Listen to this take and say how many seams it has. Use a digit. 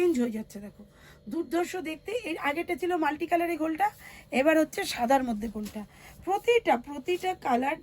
0